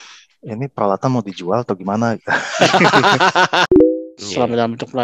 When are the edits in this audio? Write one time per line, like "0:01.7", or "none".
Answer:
0:03.7